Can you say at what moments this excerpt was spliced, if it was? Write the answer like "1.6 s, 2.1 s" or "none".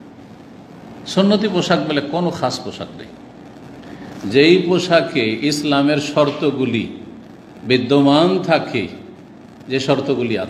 none

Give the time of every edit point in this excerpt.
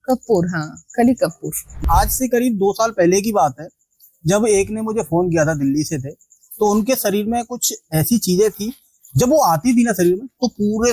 1.8 s

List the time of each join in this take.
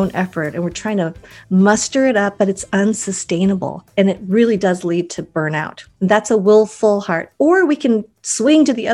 3.8 s, 5.8 s

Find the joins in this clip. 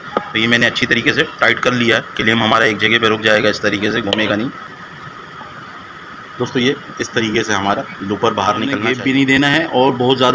4.7 s, 8.8 s

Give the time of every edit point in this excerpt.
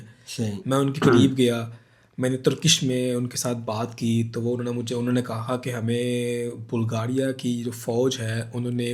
none

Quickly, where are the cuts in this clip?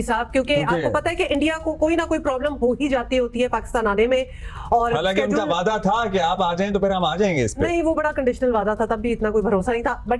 none

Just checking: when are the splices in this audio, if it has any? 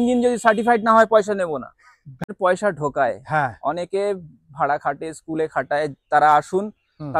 2.3 s

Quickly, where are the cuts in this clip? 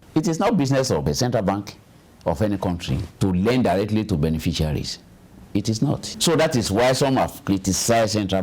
1.0 s, 6.1 s

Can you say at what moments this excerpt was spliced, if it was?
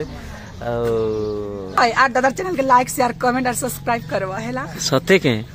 1.7 s

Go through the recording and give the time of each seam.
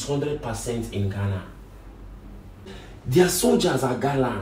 2.8 s

